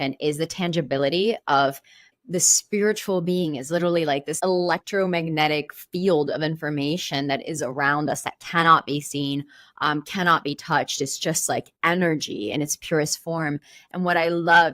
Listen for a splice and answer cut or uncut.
cut